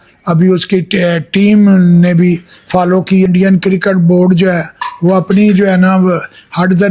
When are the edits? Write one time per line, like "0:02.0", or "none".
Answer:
0:03.2